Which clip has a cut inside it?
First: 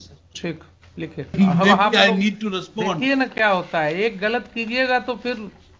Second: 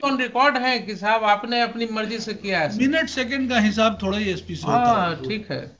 first; 1 cut; at 1.3 s

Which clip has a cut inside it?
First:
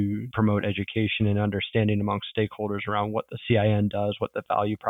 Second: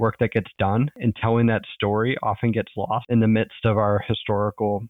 second; 2 cuts; at 0.9 s, 3.0 s

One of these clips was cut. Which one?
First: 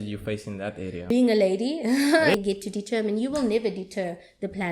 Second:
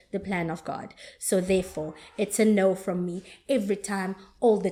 first; 2 cuts; at 1.1 s, 2.3 s

